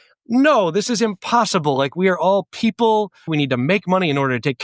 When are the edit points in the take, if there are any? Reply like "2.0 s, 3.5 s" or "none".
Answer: 3.3 s